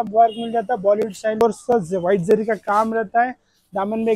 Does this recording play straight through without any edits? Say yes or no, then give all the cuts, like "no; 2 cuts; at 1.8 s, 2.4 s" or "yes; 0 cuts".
no; 1 cut; at 1.4 s